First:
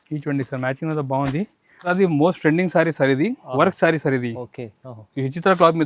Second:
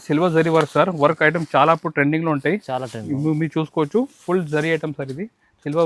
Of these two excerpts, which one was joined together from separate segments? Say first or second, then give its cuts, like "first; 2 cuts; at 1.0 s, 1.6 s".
first; 1 cut; at 1.9 s